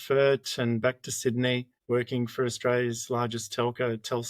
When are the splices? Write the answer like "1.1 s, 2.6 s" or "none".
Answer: 1.7 s